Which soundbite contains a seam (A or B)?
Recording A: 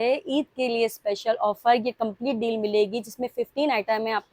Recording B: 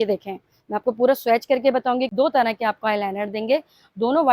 B